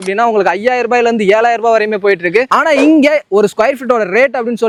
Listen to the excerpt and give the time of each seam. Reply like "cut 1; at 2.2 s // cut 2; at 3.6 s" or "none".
none